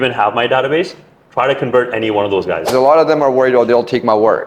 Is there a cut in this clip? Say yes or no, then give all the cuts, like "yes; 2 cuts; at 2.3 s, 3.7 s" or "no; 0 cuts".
yes; 1 cut; at 2.7 s